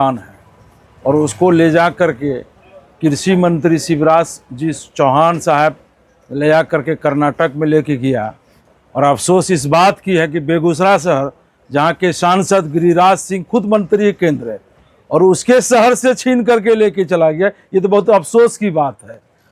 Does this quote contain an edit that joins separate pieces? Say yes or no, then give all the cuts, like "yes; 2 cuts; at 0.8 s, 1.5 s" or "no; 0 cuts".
no; 0 cuts